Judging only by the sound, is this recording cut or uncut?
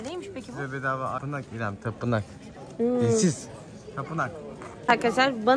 cut